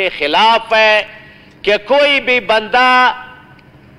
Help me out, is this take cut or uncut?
uncut